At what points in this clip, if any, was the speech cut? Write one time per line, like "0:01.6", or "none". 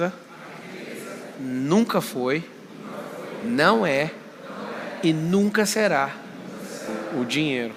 none